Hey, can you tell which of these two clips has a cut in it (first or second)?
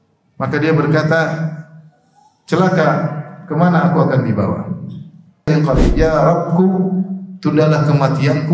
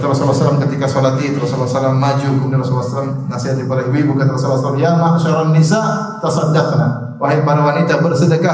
first